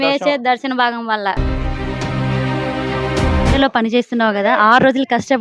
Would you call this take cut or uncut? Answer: cut